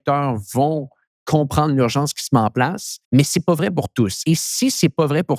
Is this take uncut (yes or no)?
no